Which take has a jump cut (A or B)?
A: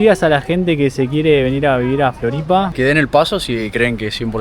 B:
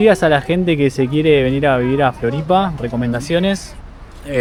A